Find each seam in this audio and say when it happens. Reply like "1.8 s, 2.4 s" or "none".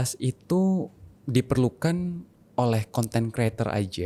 none